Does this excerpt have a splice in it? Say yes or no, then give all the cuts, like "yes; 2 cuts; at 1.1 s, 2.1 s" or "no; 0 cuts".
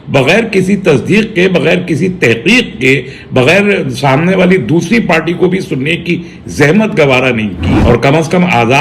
yes; 1 cut; at 7.6 s